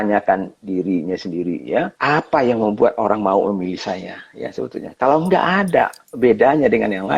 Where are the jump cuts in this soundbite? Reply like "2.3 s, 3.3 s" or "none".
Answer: 1.9 s